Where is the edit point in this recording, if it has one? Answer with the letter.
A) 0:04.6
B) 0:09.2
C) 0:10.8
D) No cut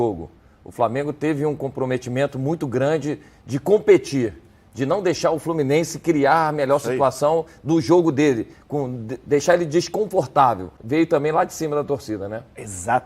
C